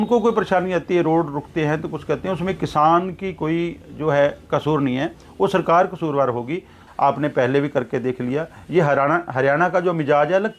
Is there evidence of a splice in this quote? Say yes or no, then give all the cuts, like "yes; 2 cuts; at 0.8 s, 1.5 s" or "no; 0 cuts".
yes; 1 cut; at 6.7 s